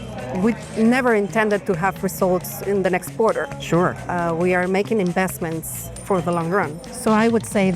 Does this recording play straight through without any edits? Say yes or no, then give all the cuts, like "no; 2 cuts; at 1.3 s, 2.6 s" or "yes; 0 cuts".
no; 1 cut; at 6.8 s